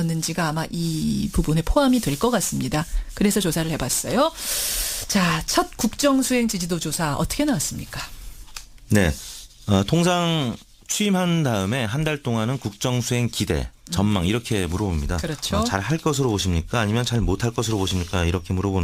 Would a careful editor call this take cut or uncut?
uncut